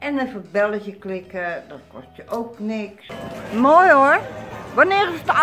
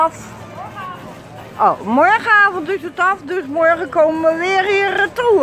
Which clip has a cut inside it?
first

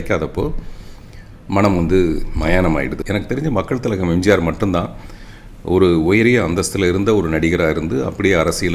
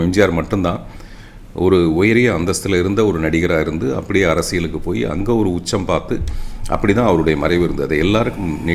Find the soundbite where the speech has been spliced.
first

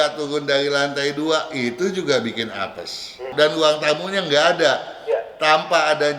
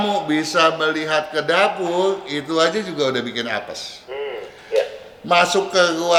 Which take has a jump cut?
first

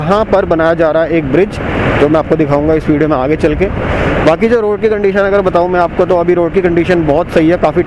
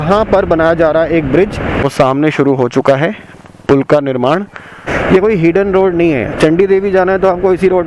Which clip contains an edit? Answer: second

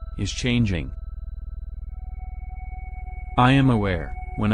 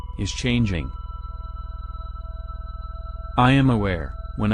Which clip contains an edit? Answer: first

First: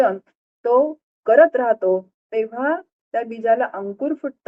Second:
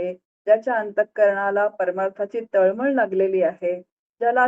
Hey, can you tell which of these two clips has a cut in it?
first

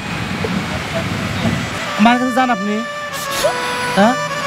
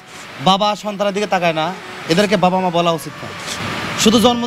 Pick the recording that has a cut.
first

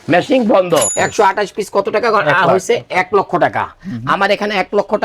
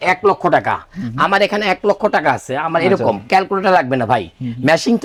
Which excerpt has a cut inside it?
first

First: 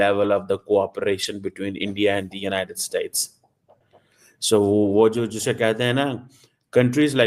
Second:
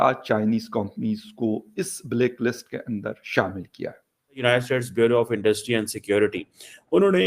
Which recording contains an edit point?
second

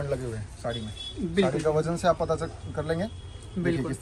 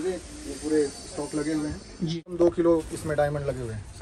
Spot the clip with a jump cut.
second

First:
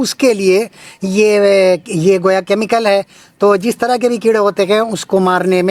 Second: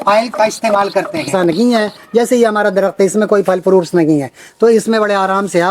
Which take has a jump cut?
second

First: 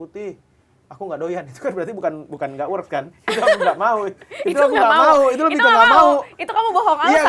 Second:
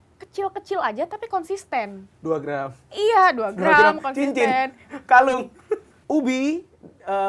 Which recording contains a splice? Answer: second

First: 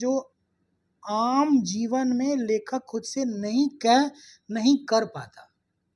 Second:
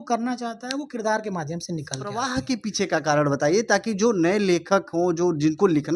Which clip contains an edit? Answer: second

